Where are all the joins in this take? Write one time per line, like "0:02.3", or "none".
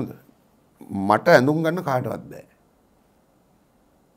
0:03.2

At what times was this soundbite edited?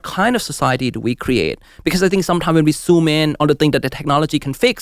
0:03.3

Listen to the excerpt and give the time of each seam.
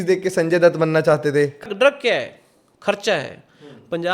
0:01.6

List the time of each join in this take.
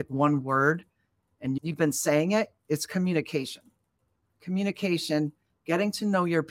none

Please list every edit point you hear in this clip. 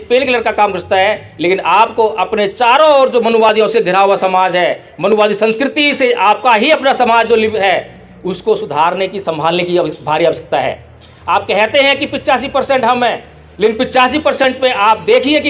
0:07.6

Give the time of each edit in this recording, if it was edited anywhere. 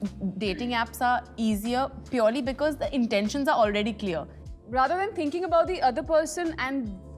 0:04.4

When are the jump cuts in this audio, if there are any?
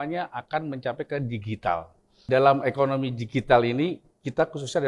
0:02.2

